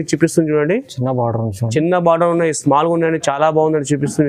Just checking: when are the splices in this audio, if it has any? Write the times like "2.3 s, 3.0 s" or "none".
none